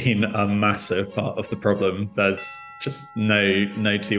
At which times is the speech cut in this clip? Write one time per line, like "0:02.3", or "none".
none